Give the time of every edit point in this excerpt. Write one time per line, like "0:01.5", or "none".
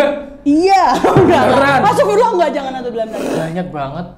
0:03.2